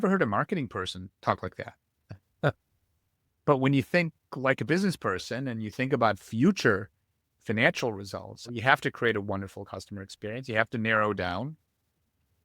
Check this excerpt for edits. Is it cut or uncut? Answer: cut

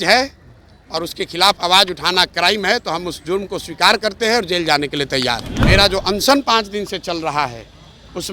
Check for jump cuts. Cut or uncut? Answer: cut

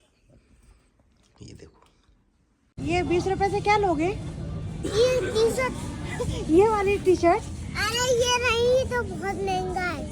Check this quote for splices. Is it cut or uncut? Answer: cut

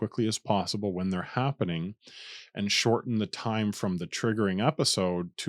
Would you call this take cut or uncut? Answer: uncut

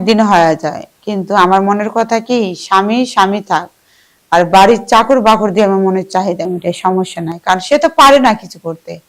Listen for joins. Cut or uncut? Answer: uncut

